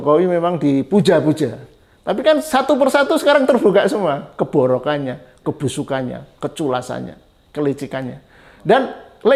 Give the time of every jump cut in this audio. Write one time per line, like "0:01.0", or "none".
none